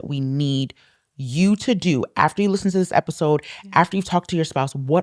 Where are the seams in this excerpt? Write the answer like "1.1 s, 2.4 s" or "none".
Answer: none